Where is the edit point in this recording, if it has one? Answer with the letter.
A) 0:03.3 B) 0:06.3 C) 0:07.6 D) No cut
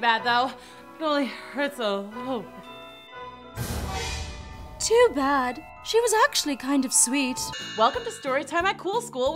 C